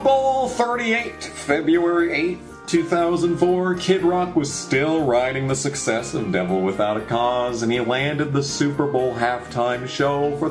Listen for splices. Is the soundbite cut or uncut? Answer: cut